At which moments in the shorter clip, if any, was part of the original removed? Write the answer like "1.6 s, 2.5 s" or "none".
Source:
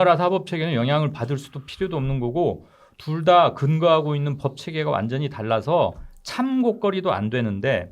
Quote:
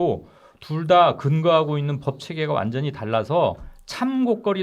none